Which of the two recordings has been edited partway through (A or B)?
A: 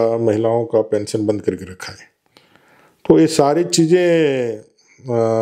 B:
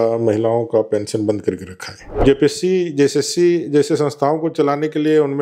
B